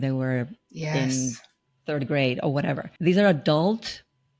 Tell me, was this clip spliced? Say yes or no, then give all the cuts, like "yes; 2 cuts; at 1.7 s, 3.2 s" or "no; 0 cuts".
no; 0 cuts